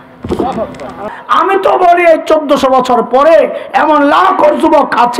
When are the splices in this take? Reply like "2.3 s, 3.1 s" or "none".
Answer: 1.1 s